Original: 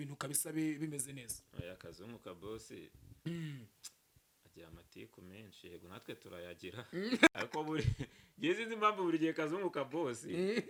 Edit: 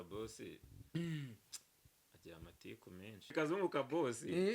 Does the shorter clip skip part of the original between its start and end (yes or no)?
yes